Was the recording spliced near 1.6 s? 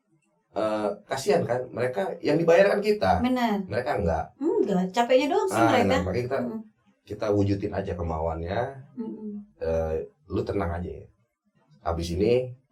no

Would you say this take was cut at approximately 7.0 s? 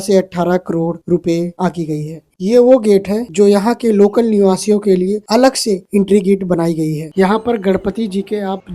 yes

